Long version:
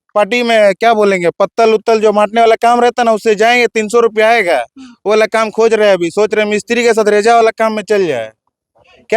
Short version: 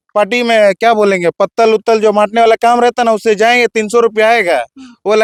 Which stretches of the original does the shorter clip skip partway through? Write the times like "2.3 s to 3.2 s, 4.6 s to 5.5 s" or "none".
none